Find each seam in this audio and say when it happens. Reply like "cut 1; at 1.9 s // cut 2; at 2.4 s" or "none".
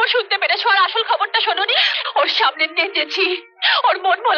cut 1; at 1.9 s